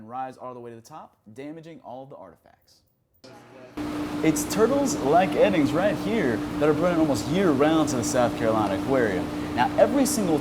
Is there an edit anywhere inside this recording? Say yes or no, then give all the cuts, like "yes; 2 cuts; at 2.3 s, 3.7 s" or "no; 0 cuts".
yes; 1 cut; at 3.1 s